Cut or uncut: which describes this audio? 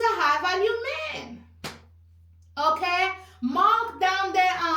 uncut